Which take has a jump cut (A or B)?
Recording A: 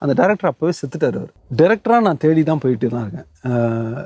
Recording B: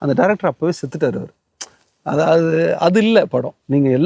A